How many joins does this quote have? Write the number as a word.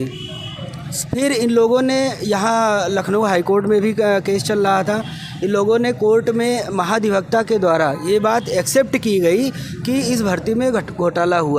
zero